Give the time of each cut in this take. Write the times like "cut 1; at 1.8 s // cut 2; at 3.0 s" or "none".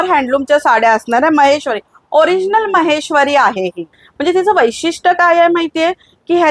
cut 1; at 4.0 s